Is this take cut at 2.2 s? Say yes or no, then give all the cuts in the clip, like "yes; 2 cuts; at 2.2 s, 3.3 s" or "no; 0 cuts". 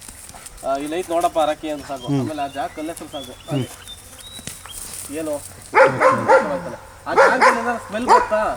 no; 0 cuts